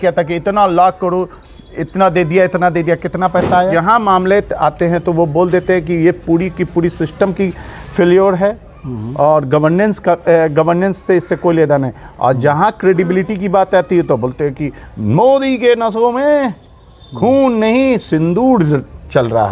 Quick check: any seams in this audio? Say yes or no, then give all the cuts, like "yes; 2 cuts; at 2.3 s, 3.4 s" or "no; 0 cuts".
yes; 1 cut; at 3.7 s